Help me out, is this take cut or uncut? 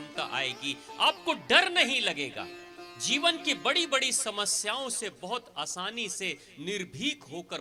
uncut